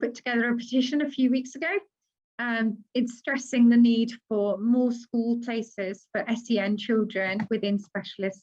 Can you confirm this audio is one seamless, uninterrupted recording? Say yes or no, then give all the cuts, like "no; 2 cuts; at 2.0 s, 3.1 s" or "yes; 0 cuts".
yes; 0 cuts